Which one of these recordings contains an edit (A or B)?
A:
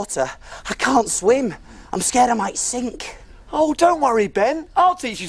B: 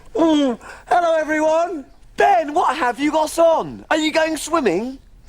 B